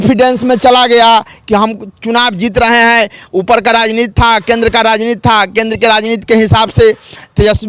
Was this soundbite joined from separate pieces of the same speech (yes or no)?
no